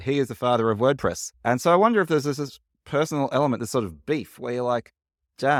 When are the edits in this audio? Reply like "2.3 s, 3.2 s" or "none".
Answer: none